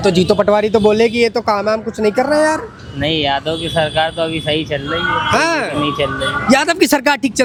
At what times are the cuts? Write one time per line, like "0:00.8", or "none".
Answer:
none